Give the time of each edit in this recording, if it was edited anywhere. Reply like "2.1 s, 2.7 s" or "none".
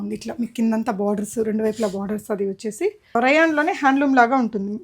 3.2 s